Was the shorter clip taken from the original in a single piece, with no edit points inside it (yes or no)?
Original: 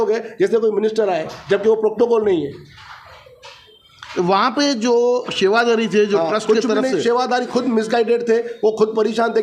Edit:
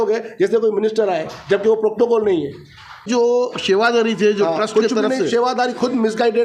no